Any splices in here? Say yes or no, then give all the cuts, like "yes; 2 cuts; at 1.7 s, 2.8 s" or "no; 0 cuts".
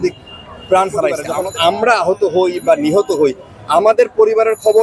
yes; 1 cut; at 1.2 s